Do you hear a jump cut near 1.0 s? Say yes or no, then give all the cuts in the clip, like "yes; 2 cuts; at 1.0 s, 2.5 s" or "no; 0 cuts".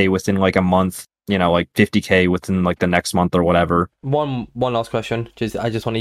yes; 2 cuts; at 1.0 s, 3.9 s